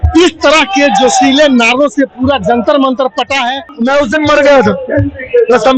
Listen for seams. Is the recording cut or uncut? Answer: cut